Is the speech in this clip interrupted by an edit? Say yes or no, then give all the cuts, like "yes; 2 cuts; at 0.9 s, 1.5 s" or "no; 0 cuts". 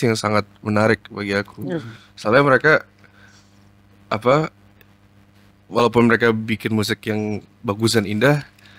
no; 0 cuts